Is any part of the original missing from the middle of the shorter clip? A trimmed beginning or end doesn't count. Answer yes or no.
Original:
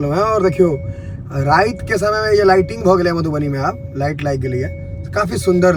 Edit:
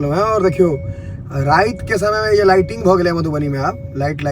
no